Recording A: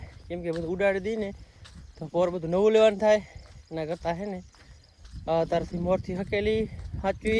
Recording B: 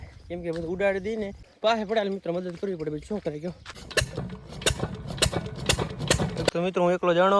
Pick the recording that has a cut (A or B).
B